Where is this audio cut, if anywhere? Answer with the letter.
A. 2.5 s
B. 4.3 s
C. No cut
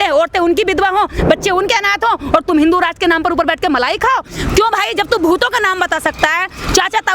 B